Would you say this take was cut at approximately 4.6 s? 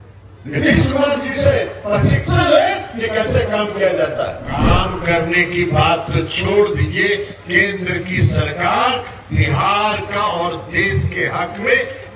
yes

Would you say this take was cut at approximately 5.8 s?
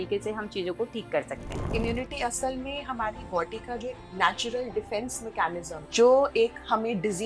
yes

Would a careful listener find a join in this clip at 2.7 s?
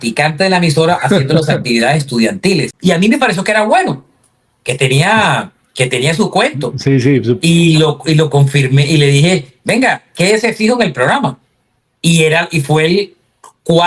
yes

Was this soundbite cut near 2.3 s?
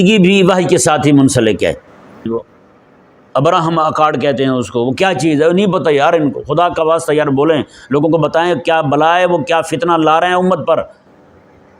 yes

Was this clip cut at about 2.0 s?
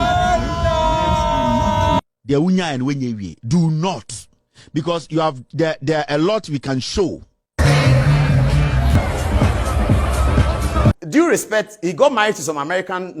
yes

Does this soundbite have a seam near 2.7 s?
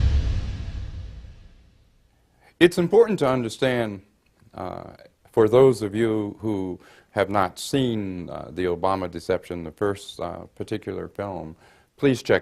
no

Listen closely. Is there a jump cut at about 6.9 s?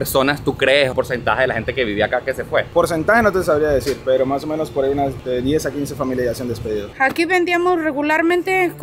yes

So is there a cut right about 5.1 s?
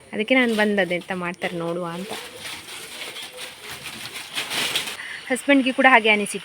yes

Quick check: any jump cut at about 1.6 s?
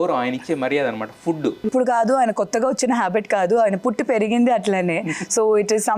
yes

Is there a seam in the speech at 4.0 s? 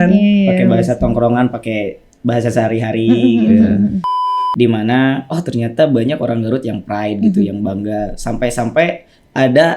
yes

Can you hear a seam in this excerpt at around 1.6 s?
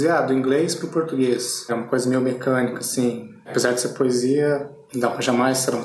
no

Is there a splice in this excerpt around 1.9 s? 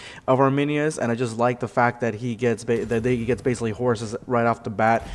yes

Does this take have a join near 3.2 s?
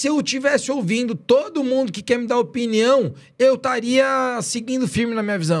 no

